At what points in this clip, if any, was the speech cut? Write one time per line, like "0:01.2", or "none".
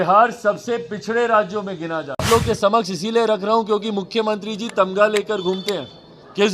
0:02.3